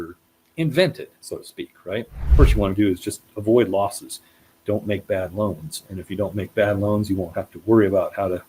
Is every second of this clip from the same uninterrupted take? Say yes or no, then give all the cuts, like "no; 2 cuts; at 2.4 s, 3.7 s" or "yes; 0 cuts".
no; 1 cut; at 2.2 s